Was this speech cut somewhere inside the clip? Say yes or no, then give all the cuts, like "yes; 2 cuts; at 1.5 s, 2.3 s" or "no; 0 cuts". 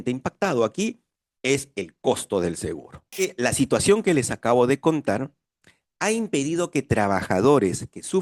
yes; 1 cut; at 3.3 s